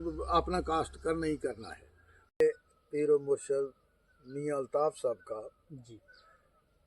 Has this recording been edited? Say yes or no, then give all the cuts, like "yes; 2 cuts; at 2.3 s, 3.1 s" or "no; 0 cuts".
yes; 1 cut; at 2.4 s